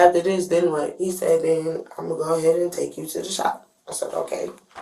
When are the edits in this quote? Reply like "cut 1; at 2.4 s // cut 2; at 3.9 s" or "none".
none